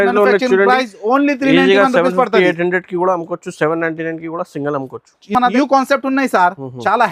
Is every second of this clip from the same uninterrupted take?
no; 1 cut; at 5.5 s

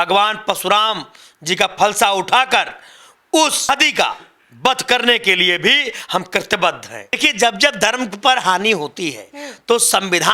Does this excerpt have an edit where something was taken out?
yes; 2 cuts; at 3.7 s, 7.2 s

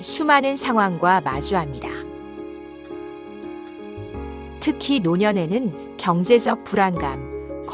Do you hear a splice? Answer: no; 0 cuts

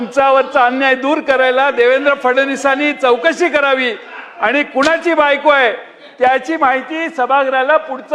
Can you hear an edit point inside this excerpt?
no; 0 cuts

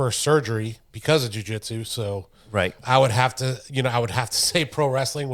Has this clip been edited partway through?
no; 0 cuts

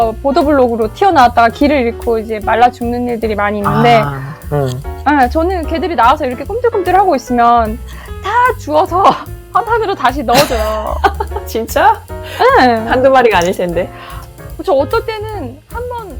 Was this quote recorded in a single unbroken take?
yes; 0 cuts

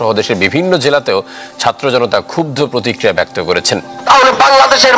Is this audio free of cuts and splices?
no; 1 cut; at 3.9 s

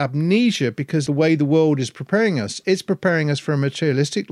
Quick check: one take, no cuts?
no; 1 cut; at 1.0 s

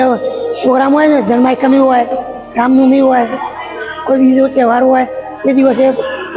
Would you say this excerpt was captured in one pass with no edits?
yes; 0 cuts

